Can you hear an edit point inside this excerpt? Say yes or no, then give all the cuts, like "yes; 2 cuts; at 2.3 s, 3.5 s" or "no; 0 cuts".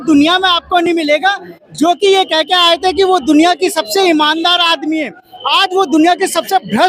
no; 0 cuts